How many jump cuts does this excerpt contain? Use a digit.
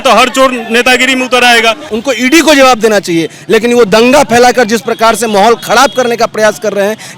1